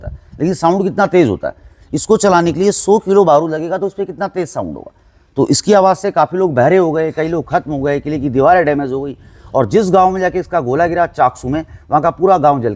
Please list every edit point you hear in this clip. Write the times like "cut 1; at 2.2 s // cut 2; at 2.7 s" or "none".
none